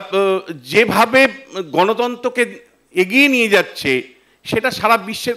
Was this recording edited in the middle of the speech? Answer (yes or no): no